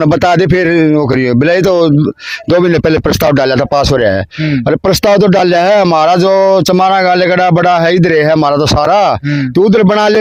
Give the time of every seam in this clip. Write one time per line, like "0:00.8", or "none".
none